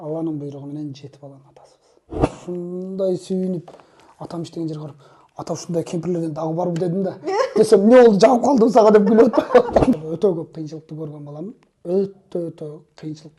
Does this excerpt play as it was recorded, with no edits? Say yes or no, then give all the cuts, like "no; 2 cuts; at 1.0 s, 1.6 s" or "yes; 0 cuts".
no; 2 cuts; at 2.3 s, 10.0 s